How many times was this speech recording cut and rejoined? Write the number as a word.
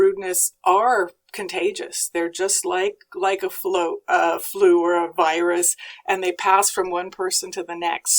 zero